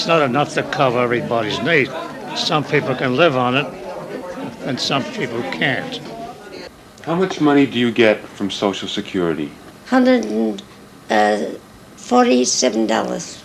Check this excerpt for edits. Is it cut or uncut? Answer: cut